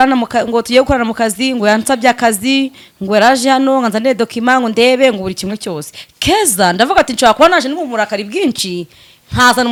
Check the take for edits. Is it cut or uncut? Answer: uncut